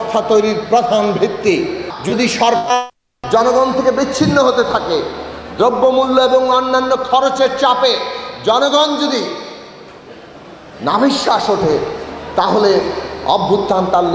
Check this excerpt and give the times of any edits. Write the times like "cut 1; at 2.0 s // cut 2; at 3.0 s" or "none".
cut 1; at 1.9 s